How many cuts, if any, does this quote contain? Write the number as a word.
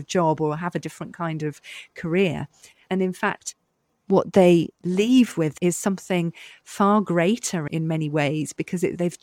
two